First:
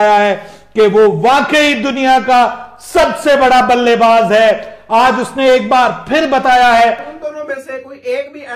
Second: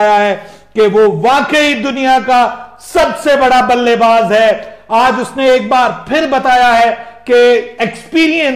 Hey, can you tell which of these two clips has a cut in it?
first; 1 cut; at 7.1 s

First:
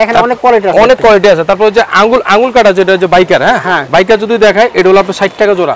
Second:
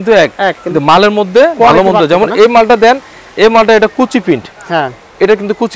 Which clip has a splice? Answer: first; 1 cut; at 3.8 s

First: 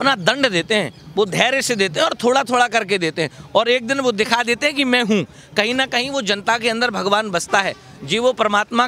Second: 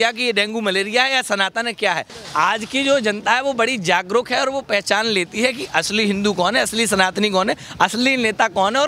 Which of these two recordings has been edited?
second; 1 cut; at 2.1 s

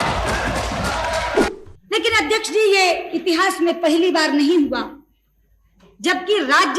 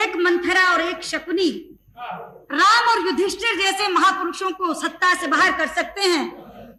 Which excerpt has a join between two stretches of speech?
first; 1 cut; at 1.5 s

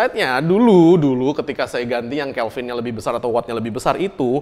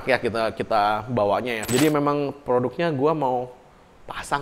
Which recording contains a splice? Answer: second; 1 cut; at 1.6 s

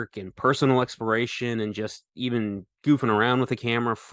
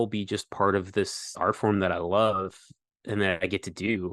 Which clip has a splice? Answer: second; 1 cut; at 1.2 s

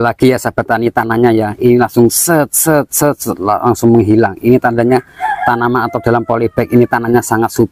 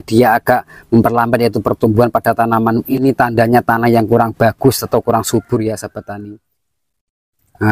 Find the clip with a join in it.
second; 1 cut; at 6.2 s

